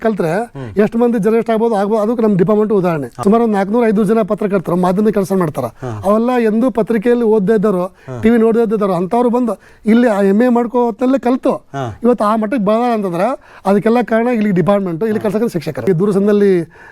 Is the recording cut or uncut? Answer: cut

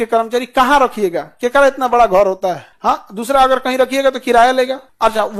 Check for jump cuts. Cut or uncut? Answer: uncut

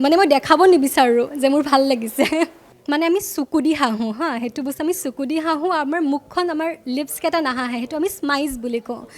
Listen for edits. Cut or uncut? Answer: cut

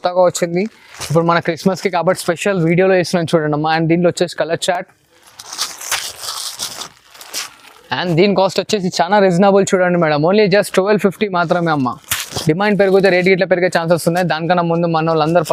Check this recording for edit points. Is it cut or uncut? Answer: uncut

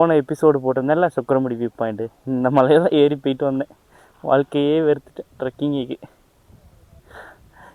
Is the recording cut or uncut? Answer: uncut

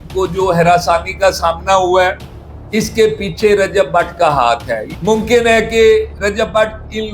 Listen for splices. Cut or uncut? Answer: cut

